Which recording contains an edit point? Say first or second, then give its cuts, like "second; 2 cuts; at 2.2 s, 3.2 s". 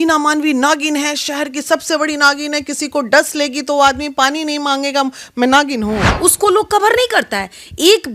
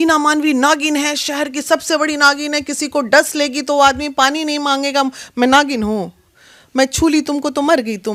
first; 1 cut; at 6.1 s